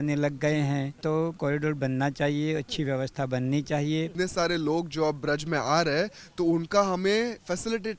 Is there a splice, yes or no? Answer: yes